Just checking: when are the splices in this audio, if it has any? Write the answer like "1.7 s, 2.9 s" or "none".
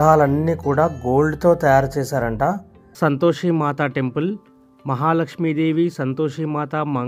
2.8 s